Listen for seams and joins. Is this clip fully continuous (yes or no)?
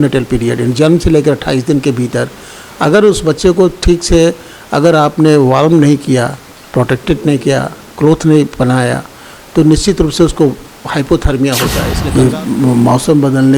no